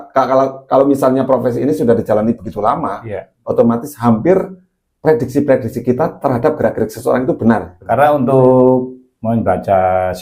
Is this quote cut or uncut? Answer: cut